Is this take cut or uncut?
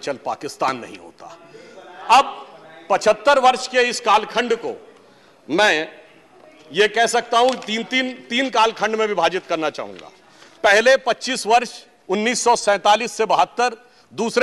uncut